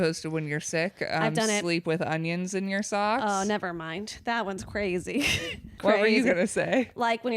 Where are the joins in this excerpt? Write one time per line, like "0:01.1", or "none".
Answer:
0:05.8